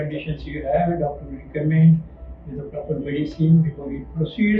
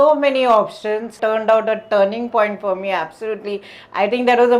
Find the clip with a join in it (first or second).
second